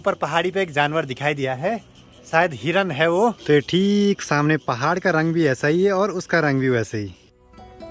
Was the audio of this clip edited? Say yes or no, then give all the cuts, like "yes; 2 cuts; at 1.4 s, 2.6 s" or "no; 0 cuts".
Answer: no; 0 cuts